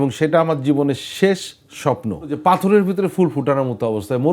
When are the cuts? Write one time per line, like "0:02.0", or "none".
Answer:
0:02.4